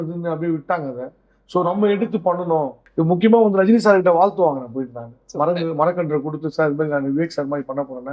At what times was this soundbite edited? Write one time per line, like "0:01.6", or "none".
0:02.8